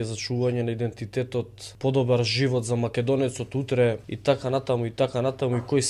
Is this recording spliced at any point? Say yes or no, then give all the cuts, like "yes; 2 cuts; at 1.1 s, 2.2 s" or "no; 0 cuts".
yes; 2 cuts; at 1.6 s, 4.1 s